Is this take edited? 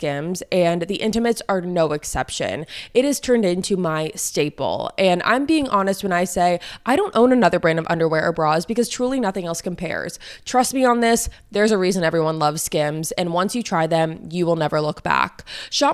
no; 0 cuts

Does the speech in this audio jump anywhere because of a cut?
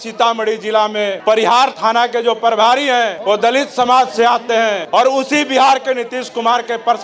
yes; 3 cuts; at 1.6 s, 3.2 s, 4.8 s

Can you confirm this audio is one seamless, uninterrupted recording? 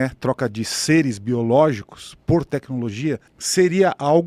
yes; 0 cuts

